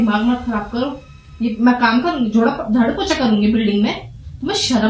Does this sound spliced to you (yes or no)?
no